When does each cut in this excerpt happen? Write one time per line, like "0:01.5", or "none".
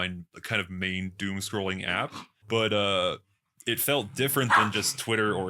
0:02.3